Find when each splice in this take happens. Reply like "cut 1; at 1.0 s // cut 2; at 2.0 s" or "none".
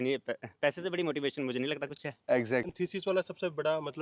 cut 1; at 2.7 s